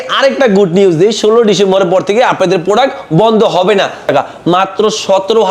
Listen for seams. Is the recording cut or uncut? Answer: cut